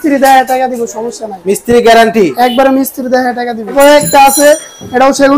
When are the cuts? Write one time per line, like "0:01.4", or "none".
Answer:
0:03.7